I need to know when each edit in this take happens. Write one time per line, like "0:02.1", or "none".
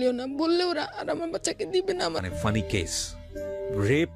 0:02.2